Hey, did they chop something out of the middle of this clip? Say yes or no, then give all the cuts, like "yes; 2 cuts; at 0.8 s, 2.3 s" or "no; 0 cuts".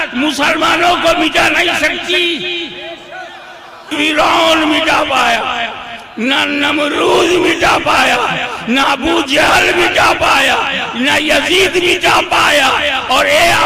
yes; 1 cut; at 3.9 s